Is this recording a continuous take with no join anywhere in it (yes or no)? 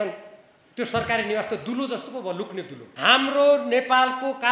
no